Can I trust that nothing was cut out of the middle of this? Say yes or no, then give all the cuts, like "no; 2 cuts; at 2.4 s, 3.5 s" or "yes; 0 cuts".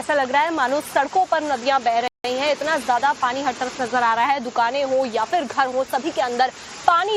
yes; 0 cuts